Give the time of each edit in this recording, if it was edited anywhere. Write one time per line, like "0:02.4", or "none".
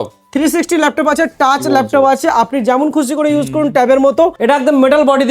0:04.3

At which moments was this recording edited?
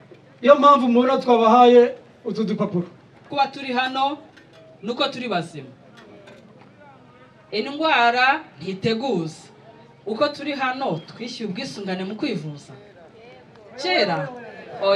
0:03.3

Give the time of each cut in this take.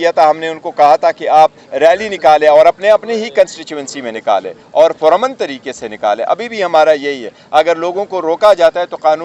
none

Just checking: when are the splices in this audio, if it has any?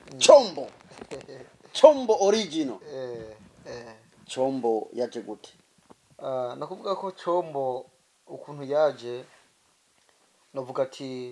none

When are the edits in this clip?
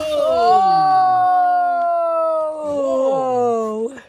none

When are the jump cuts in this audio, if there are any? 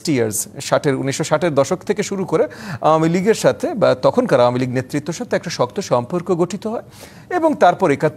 none

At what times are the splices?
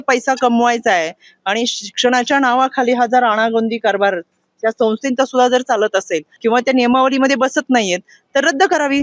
0:06.2

